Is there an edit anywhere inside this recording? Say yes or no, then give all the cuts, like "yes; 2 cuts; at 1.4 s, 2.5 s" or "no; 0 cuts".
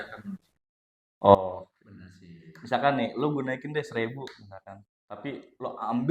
no; 0 cuts